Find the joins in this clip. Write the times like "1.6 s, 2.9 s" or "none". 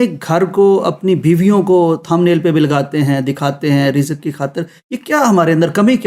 none